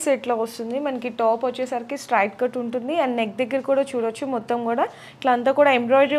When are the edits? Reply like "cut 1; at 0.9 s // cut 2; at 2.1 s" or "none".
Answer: none